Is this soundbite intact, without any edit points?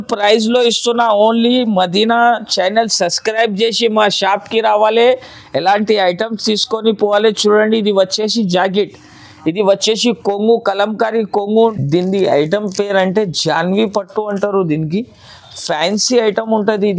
no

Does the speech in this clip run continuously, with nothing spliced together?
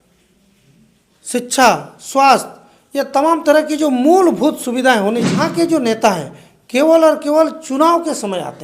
no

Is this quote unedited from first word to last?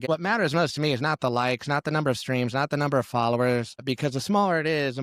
no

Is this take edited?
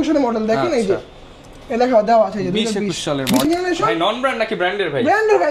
yes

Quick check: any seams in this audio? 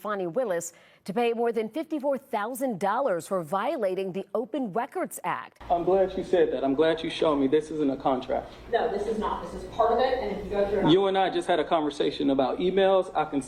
yes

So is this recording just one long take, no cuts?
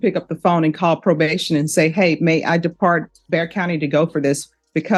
yes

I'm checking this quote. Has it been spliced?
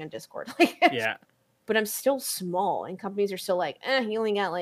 yes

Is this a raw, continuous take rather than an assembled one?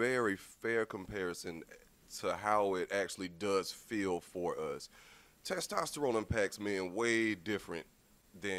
yes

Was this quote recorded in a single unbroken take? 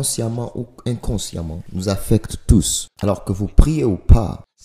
no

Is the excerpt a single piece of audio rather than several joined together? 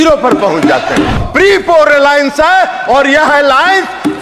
no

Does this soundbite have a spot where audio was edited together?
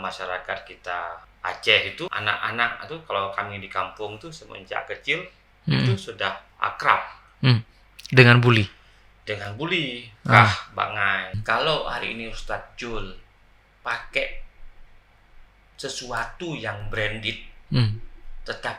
yes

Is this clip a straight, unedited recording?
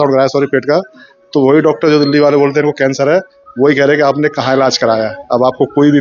yes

